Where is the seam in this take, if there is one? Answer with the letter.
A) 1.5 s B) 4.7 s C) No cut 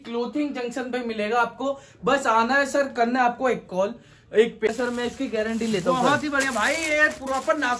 B